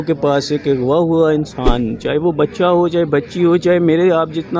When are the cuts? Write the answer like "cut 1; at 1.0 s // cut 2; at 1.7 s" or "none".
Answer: none